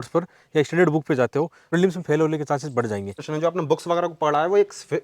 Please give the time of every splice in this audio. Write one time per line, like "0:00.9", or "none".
0:01.6
0:03.3